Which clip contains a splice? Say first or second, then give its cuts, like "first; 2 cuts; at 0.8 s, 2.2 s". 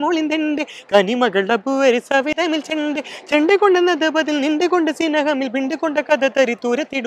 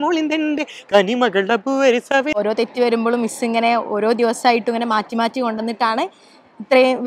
second; 1 cut; at 2.3 s